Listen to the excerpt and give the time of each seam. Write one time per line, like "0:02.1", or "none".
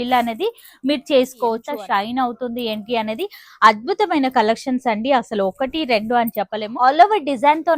0:01.6
0:06.6